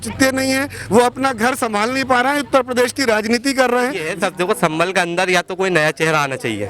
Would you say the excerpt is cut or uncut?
cut